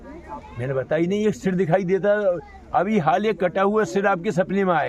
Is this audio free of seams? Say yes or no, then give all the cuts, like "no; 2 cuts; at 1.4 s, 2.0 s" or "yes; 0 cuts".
yes; 0 cuts